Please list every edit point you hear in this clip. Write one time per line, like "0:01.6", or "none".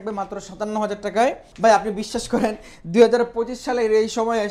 0:01.5